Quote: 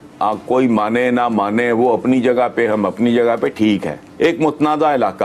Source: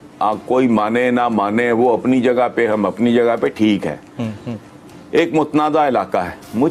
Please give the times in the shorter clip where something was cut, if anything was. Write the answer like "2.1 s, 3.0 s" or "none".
4.0 s